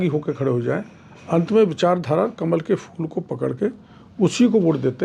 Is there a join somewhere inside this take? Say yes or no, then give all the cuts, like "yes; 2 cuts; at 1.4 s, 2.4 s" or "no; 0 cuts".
no; 0 cuts